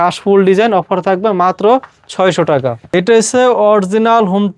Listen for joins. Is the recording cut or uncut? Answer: cut